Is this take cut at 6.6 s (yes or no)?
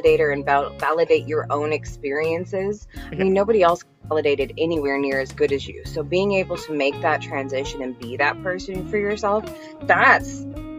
no